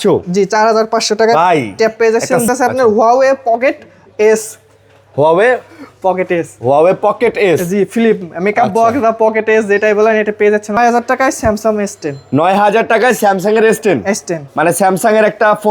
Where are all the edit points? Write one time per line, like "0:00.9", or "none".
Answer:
0:02.5
0:10.8

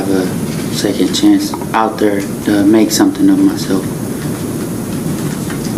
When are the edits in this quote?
none

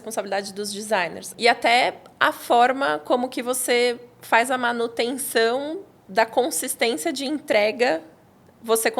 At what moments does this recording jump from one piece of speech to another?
0:01.3

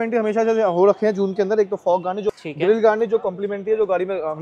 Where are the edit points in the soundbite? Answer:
none

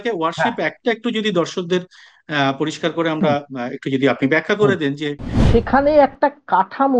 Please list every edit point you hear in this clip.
0:05.4

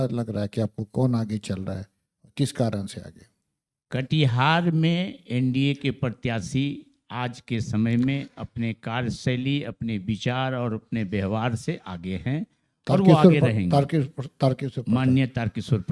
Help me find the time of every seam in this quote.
none

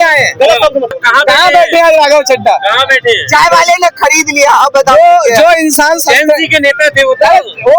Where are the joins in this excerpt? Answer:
0:01.0

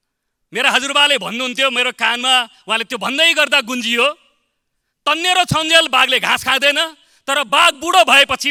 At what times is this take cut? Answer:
none

